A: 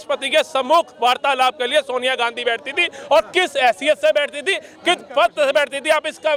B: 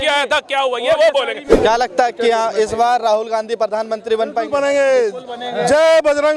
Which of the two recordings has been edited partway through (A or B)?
B